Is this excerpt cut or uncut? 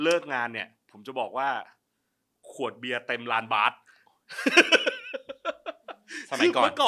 uncut